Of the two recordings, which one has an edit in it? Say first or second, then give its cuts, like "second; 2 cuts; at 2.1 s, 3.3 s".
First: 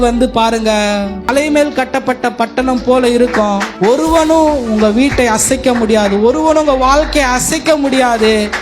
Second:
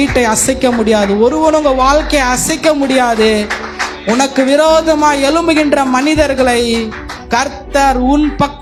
first; 2 cuts; at 1.3 s, 3.7 s